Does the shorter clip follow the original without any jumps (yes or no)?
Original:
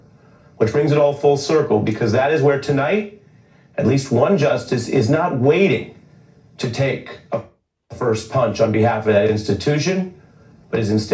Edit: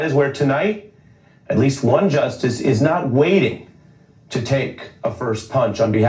no